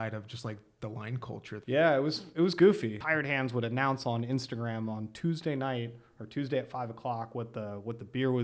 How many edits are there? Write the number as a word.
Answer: two